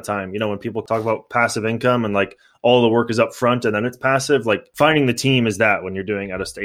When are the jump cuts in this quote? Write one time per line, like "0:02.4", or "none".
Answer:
0:00.8
0:04.7